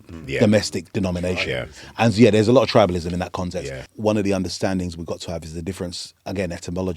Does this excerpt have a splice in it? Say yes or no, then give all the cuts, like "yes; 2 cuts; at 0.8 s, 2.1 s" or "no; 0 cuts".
yes; 1 cut; at 3.9 s